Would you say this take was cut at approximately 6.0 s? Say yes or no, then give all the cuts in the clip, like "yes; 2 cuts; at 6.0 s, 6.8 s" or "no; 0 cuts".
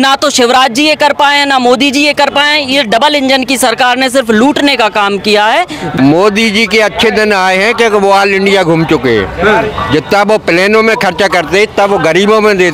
yes; 1 cut; at 6.0 s